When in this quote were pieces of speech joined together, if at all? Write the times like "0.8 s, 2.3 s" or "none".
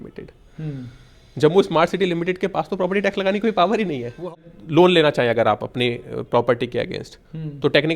4.3 s